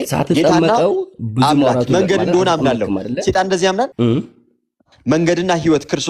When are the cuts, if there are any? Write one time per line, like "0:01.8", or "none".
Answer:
0:03.9